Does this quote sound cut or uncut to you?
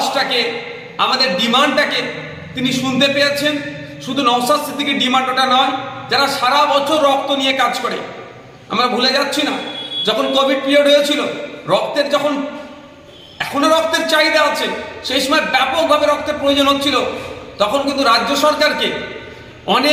uncut